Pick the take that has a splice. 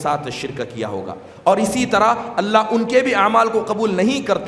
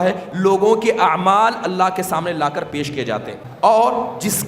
second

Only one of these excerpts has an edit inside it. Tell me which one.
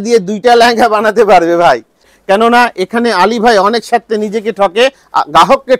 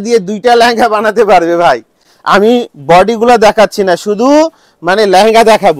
first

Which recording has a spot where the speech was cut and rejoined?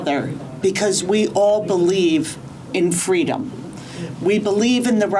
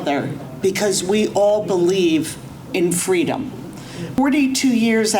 second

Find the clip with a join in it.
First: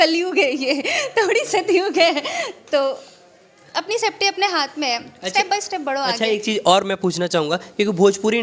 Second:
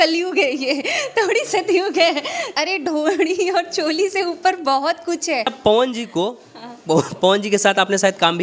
second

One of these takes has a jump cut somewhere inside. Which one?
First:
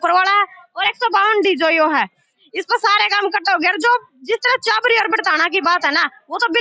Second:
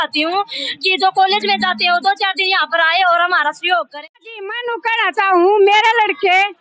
second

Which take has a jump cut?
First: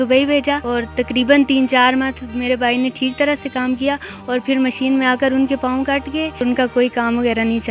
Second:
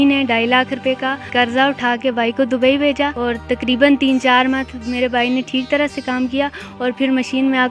first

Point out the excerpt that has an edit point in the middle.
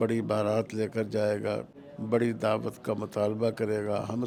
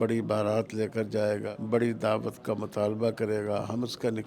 second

